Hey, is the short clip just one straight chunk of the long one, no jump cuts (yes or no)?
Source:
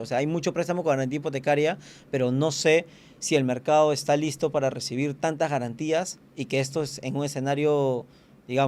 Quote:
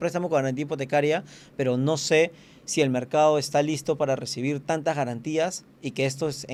yes